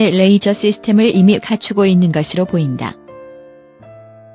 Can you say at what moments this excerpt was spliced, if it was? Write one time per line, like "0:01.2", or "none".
0:03.0